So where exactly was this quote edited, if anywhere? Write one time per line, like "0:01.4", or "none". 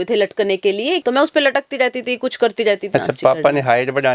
0:01.0
0:02.9